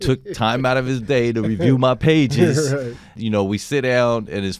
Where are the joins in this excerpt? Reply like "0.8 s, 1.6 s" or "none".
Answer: 3.1 s